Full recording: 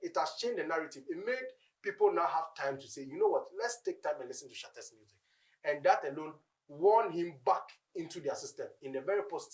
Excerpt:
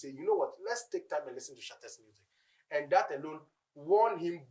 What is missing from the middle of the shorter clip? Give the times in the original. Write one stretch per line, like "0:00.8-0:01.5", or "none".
none